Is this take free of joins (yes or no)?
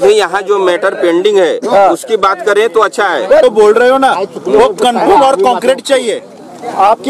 yes